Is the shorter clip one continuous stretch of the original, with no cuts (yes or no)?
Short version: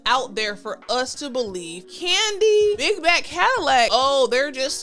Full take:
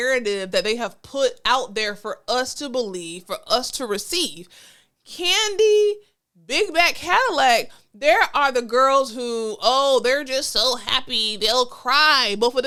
no